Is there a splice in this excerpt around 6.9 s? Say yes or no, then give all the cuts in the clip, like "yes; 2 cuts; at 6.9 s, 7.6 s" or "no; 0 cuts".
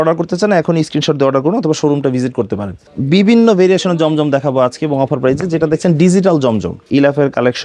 yes; 2 cuts; at 2.8 s, 6.9 s